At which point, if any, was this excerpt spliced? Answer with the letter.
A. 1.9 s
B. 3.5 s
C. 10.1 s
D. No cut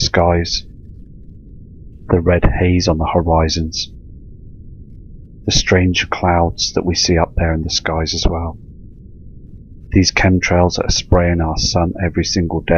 C